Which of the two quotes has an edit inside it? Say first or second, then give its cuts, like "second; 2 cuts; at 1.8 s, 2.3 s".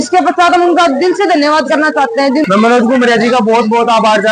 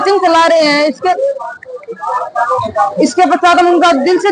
first; 1 cut; at 2.4 s